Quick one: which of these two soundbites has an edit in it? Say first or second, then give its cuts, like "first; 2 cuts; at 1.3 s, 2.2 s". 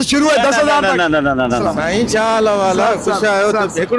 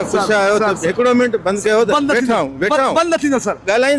first; 1 cut; at 1.7 s